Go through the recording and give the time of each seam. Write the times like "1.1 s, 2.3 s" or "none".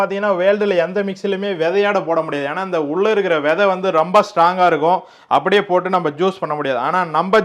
none